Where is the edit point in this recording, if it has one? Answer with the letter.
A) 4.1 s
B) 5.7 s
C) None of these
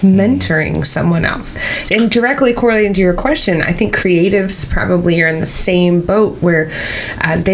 C